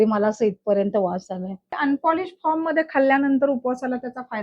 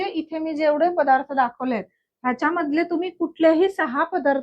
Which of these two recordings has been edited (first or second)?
first